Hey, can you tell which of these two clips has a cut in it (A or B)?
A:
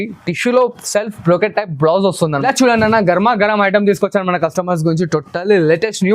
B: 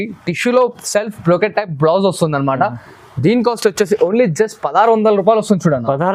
A